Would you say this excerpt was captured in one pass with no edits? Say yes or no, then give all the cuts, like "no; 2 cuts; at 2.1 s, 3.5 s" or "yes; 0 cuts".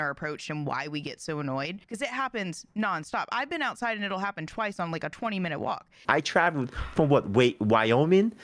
no; 2 cuts; at 1.8 s, 6.0 s